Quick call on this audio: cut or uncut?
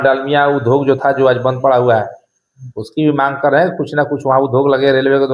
uncut